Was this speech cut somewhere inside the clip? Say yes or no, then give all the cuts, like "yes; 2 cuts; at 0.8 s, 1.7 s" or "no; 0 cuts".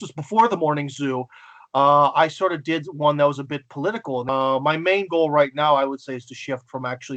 yes; 1 cut; at 4.3 s